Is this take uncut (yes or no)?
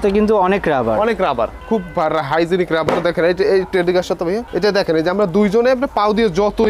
yes